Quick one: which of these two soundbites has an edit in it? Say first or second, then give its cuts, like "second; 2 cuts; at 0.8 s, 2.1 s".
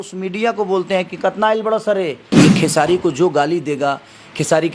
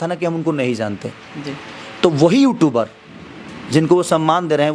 first; 1 cut; at 2.2 s